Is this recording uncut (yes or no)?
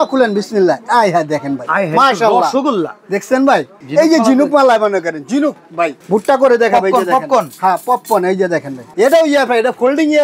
no